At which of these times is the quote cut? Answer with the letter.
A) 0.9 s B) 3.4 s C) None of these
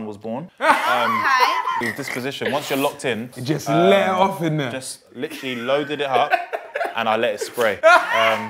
B